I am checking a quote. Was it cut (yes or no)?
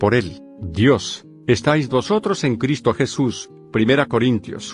yes